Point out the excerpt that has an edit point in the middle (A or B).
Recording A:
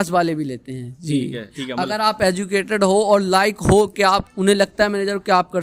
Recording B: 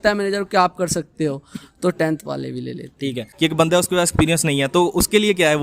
B